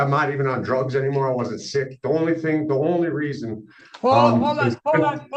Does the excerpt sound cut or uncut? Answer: uncut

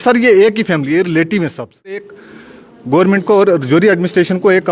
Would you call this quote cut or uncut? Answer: cut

